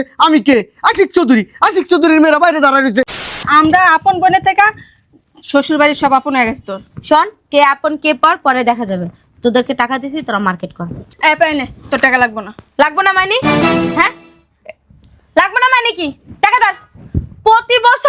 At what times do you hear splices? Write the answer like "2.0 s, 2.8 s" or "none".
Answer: 3.4 s